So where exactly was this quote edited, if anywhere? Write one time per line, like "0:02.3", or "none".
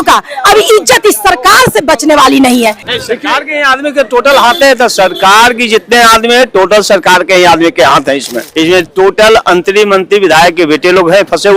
0:02.9
0:08.4